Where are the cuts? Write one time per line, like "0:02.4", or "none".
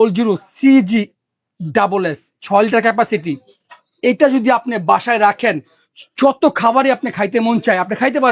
none